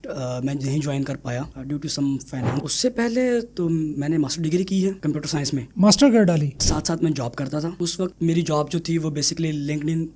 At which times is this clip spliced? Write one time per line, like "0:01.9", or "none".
0:02.5
0:06.6